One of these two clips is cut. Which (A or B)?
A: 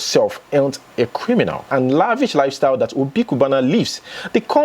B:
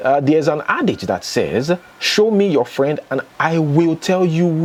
A